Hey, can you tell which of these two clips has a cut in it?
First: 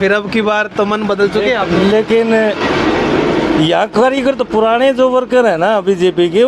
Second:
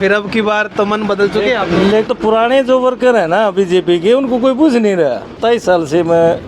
second; 2 cuts; at 2.1 s, 5.4 s

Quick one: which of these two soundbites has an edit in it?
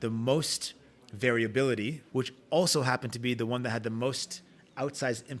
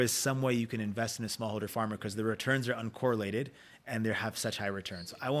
first; 1 cut; at 2.0 s

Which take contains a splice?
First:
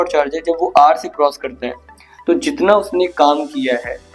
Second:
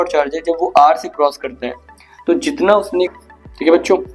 second; 1 cut; at 3.1 s

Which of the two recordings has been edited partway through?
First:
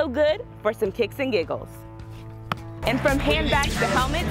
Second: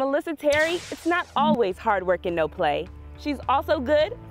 first; 1 cut; at 2.8 s

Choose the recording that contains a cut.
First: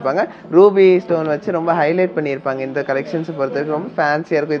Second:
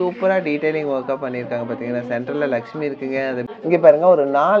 second; 1 cut; at 3.5 s

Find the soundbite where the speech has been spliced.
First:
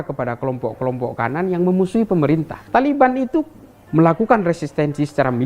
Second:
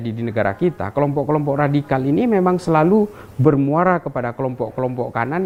first; 1 cut; at 2.6 s

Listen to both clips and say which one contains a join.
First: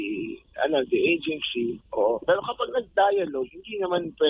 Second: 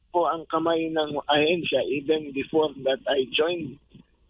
first; 1 cut; at 1.8 s

